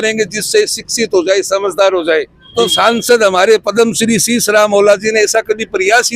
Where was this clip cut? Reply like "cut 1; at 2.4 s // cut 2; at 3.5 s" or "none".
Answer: cut 1; at 2.5 s